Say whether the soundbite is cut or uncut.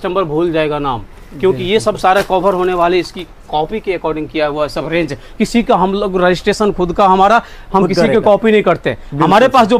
uncut